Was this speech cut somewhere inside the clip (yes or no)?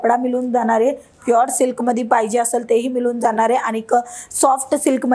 no